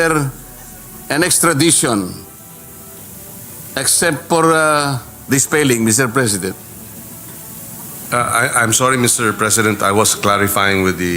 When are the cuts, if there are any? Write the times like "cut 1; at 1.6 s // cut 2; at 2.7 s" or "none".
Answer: none